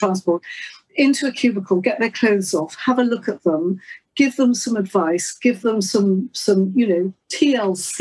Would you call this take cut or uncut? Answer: uncut